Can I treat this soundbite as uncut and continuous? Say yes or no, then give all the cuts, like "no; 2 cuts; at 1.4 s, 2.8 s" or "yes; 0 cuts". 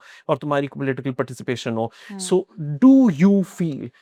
yes; 0 cuts